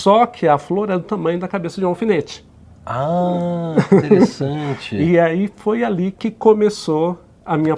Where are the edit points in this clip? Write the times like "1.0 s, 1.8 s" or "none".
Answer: none